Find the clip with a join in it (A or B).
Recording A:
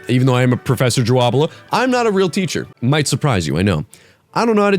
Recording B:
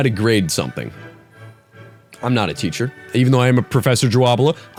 A